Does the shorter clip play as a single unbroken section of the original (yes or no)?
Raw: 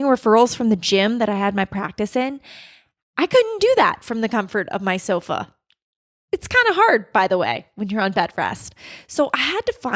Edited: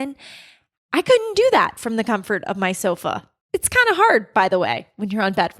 no